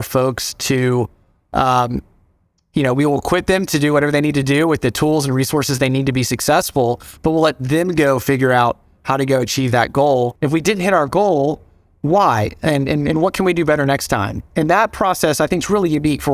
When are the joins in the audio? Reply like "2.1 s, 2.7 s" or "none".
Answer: 10.4 s